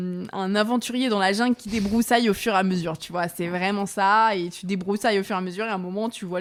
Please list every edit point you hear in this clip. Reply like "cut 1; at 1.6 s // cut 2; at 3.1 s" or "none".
none